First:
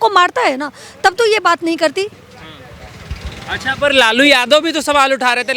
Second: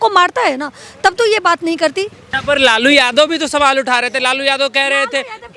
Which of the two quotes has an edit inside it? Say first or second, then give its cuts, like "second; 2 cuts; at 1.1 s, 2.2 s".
second; 1 cut; at 2.3 s